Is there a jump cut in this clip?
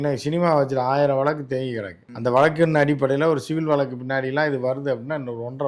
no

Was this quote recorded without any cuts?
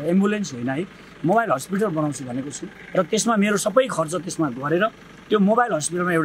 yes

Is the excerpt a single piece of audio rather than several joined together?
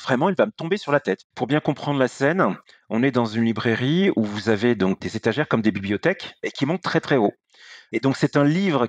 yes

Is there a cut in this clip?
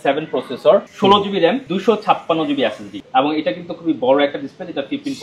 yes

